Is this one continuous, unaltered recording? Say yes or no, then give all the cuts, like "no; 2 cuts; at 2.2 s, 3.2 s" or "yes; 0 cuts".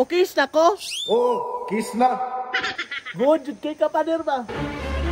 yes; 0 cuts